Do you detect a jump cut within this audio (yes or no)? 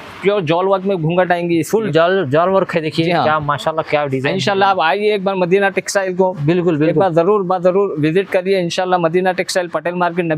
no